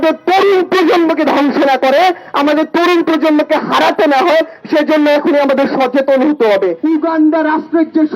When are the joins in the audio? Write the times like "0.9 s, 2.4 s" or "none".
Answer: 6.8 s

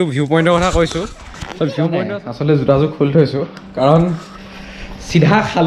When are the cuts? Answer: 2.0 s

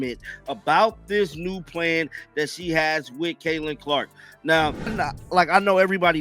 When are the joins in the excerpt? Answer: 4.8 s

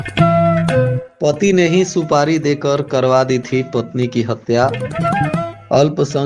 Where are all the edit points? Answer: 1.0 s

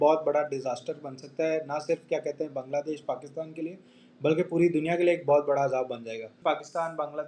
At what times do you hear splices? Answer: 6.2 s

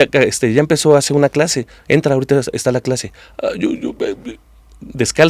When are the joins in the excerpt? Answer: none

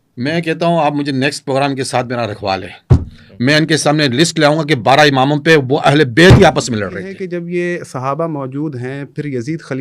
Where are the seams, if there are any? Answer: 7.2 s

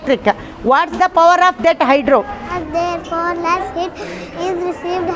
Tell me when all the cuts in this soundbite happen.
2.5 s

